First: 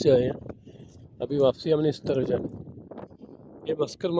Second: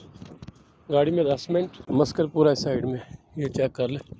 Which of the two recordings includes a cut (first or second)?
second